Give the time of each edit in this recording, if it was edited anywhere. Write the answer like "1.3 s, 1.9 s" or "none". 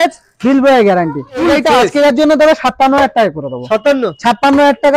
1.4 s